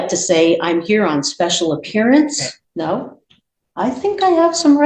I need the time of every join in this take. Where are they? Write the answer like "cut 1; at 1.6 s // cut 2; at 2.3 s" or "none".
cut 1; at 2.5 s